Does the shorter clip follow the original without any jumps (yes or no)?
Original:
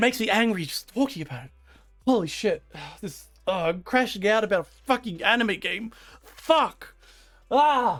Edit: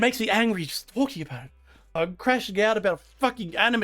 no